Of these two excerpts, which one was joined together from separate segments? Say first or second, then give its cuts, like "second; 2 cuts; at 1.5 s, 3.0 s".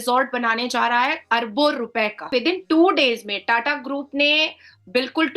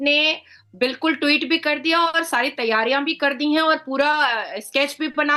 first; 1 cut; at 2.3 s